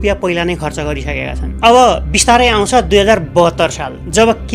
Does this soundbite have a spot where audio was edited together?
no; 0 cuts

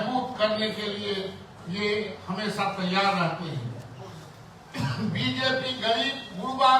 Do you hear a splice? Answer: no; 0 cuts

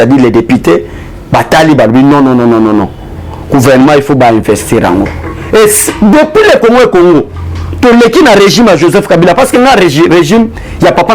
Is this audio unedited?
yes; 0 cuts

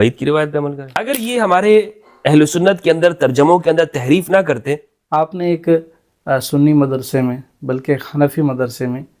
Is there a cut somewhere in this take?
yes; 2 cuts; at 0.9 s, 4.9 s

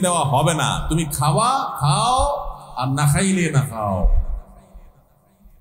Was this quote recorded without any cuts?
yes; 0 cuts

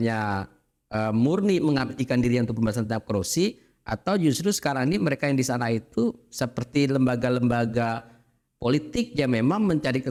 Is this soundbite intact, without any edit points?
yes; 0 cuts

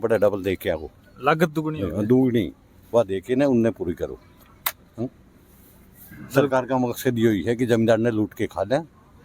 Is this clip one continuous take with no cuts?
yes; 0 cuts

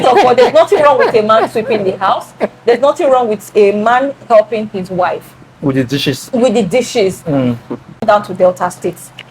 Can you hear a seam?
yes; 1 cut; at 8.0 s

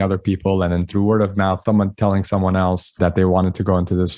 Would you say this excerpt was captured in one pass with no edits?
no; 1 cut; at 2.9 s

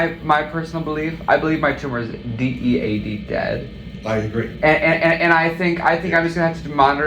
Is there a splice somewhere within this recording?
no; 0 cuts

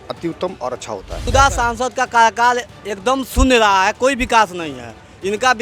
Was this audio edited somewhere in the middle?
yes; 1 cut; at 1.3 s

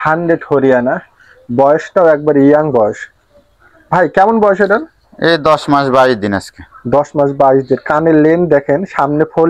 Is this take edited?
no; 0 cuts

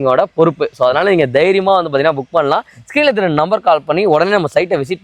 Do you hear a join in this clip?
no; 0 cuts

